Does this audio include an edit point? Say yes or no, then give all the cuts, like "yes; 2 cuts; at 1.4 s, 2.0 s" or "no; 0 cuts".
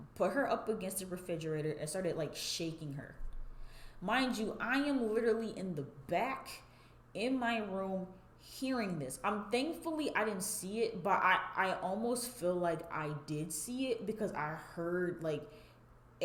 no; 0 cuts